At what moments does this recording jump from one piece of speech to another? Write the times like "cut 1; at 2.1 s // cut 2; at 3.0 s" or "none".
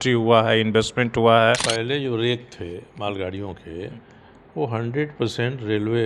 cut 1; at 1.7 s